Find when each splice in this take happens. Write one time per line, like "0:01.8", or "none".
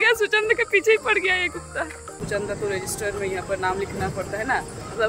0:02.2